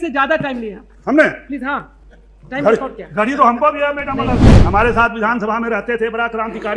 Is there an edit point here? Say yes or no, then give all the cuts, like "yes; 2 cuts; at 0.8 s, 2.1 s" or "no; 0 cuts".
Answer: yes; 1 cut; at 4.5 s